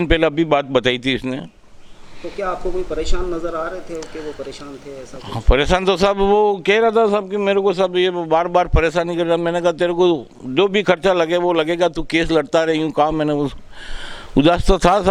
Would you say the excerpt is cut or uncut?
uncut